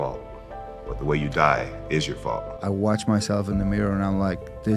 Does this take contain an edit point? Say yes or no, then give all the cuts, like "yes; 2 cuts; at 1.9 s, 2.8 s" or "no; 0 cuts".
yes; 1 cut; at 2.5 s